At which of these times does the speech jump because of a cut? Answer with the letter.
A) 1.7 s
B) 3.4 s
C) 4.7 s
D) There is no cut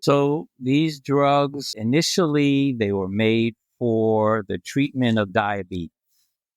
A